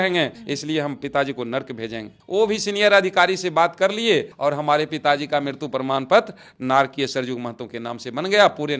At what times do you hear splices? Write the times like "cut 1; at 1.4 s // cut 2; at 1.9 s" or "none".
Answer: none